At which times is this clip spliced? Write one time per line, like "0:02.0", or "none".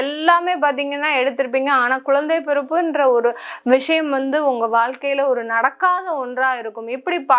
none